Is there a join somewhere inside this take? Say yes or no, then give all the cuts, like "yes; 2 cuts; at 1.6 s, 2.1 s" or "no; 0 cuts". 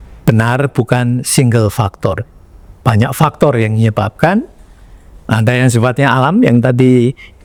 no; 0 cuts